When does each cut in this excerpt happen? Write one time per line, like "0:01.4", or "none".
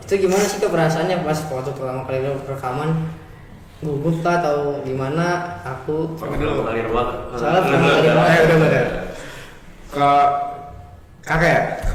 none